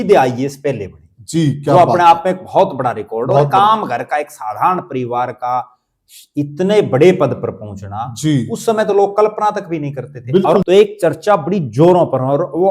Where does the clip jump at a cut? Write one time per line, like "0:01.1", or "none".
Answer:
0:10.6

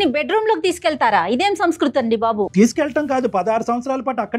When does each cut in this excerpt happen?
none

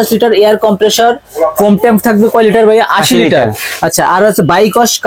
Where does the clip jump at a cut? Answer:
none

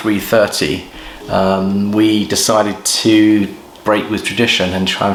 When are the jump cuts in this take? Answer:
none

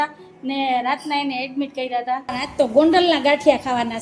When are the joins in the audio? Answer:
0:02.3

